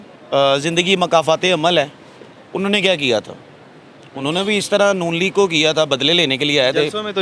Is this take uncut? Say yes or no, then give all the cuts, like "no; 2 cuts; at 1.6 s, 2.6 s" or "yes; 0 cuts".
yes; 0 cuts